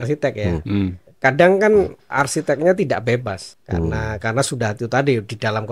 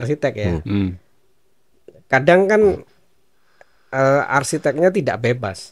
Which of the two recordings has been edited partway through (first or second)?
first